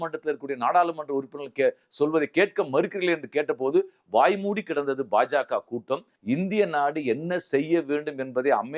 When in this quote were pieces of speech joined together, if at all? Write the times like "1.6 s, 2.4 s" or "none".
6.1 s